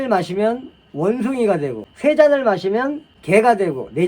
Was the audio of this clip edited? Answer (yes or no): yes